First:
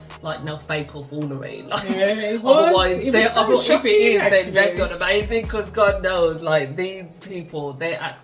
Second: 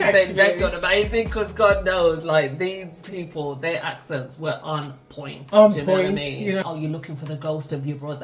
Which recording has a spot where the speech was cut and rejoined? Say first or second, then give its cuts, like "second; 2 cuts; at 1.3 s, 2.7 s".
second; 1 cut; at 6.6 s